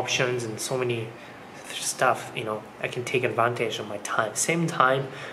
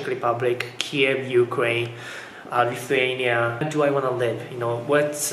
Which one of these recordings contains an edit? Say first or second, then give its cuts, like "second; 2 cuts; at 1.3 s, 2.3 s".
second; 1 cut; at 3.7 s